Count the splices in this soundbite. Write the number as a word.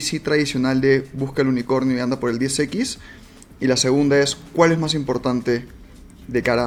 zero